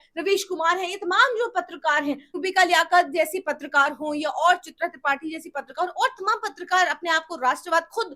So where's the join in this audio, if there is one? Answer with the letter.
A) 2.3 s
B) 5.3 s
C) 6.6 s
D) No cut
A